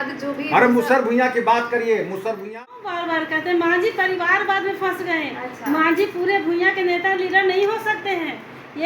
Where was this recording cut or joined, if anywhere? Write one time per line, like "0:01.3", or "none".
0:02.5